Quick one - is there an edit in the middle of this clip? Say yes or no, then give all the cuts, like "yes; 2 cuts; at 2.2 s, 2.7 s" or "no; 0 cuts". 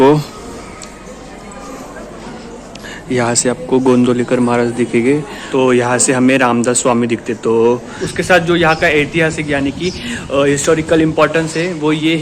yes; 2 cuts; at 5.4 s, 8.0 s